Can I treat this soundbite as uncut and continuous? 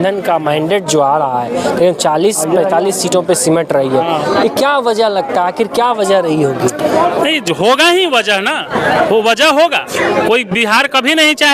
yes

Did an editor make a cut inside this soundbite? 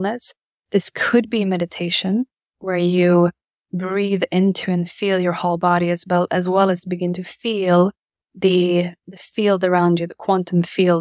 no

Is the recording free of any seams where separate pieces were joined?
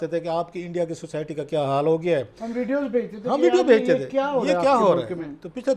yes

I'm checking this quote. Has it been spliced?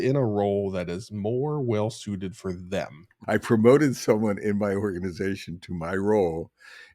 yes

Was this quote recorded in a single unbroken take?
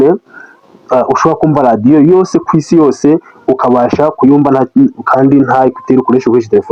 yes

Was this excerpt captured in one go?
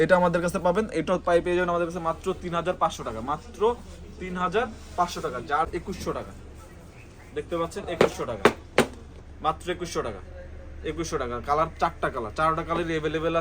no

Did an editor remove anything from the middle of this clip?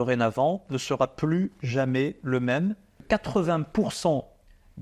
yes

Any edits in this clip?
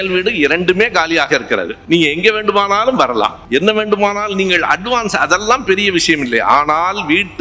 yes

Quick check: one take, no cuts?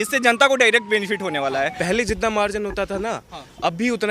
no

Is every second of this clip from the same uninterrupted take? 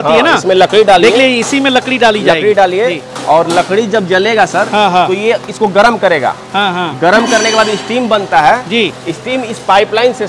yes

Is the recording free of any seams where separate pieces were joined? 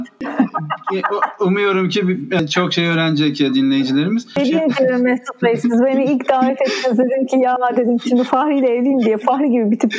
yes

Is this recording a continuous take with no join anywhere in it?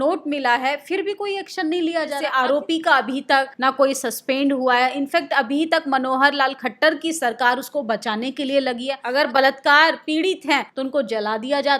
no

